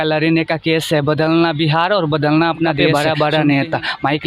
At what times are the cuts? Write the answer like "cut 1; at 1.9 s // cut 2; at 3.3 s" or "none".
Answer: cut 1; at 2.8 s